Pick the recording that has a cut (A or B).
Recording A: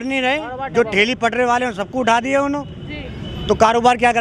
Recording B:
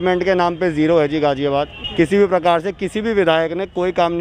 B